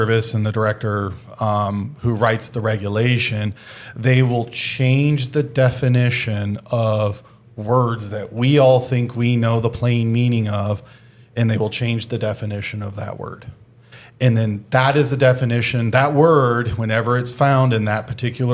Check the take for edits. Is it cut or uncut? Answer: uncut